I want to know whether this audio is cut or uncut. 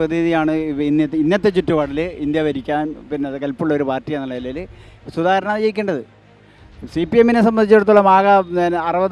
uncut